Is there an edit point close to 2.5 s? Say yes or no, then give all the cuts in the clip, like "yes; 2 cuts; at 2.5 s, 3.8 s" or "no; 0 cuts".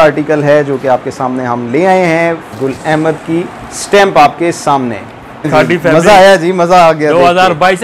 yes; 2 cuts; at 2.5 s, 5.5 s